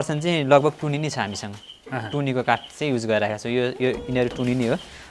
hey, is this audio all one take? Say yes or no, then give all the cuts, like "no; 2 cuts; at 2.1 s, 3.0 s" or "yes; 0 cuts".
yes; 0 cuts